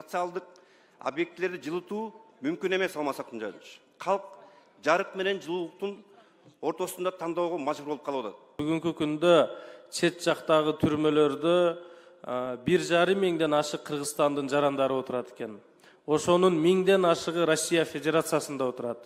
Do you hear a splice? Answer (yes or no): yes